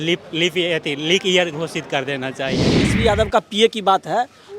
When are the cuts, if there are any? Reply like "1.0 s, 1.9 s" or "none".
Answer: 2.9 s